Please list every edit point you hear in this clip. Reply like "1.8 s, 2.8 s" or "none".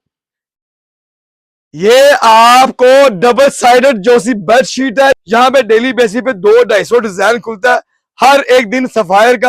5.2 s

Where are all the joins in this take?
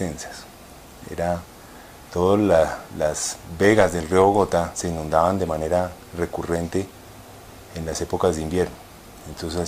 none

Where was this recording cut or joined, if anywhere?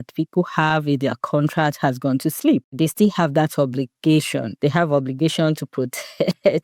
2.8 s, 4.4 s

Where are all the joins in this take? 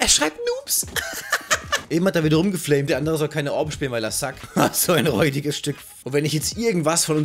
1.8 s, 2.9 s, 5.9 s

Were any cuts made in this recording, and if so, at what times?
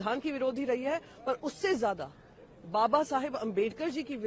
none

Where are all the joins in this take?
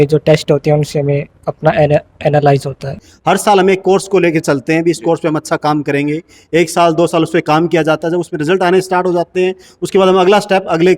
3.1 s

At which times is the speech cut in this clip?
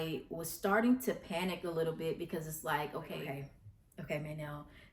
3.2 s

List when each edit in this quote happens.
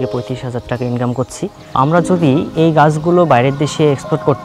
1.7 s

